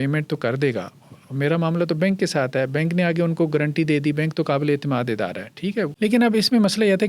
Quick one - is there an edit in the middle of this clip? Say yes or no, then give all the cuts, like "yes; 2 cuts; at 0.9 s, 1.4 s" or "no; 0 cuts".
yes; 1 cut; at 5.9 s